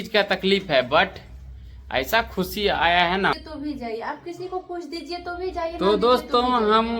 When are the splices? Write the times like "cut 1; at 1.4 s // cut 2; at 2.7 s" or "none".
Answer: cut 1; at 3.3 s